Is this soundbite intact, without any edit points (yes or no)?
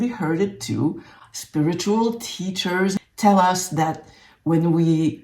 no